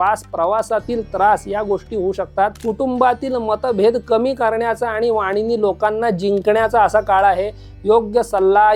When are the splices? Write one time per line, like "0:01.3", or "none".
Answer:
0:02.6